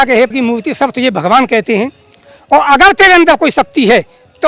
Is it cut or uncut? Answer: uncut